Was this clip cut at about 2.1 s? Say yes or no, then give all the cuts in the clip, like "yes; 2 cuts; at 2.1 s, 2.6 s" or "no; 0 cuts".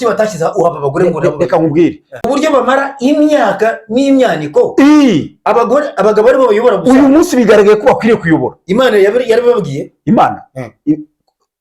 yes; 1 cut; at 2.1 s